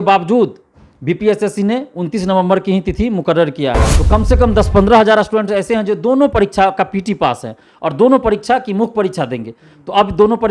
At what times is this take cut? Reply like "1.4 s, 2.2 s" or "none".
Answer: 3.9 s